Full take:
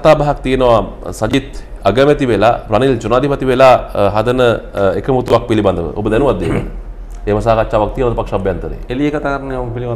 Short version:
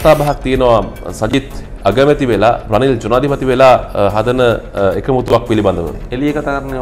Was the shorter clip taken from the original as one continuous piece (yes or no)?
no